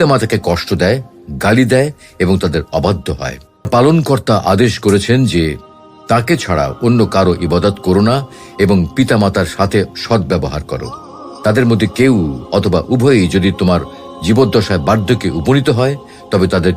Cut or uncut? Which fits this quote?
cut